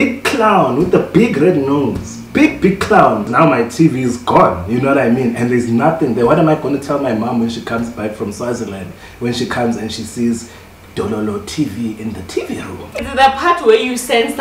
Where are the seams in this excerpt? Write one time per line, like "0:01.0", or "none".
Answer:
0:03.3
0:13.2